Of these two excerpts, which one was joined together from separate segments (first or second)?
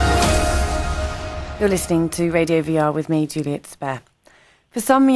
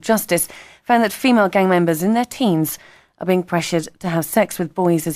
second